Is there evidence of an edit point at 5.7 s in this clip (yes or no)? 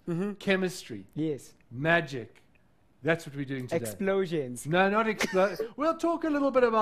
yes